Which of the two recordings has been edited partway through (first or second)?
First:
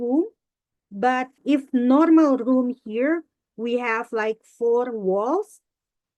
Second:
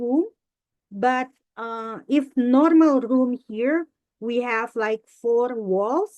first